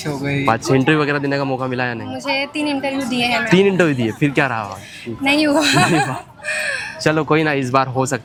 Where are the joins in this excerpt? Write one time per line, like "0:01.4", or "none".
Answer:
none